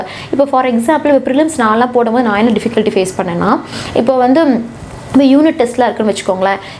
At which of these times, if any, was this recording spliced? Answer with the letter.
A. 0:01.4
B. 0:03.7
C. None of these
C